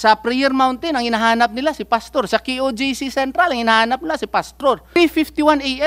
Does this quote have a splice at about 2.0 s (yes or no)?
no